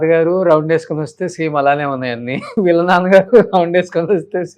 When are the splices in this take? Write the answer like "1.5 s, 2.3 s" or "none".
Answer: 2.5 s